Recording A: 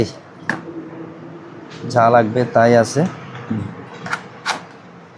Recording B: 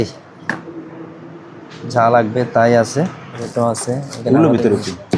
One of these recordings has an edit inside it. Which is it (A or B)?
B